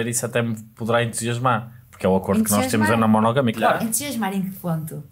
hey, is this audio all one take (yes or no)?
no